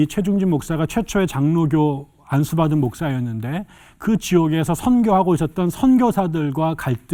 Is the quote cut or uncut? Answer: uncut